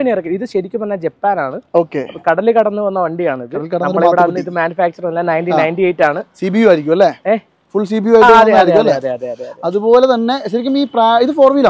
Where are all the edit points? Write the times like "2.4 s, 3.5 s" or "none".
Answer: none